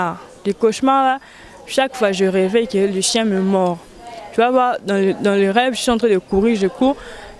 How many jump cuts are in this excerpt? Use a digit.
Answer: 0